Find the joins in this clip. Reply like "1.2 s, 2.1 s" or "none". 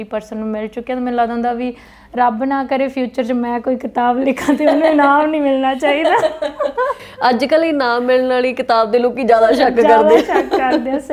none